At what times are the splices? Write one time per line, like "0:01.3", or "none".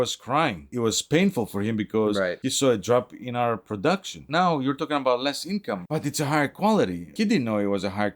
0:04.2
0:07.1